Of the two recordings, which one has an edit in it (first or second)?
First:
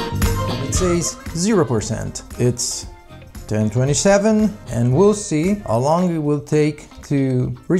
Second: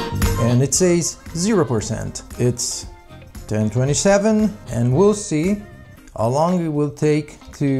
first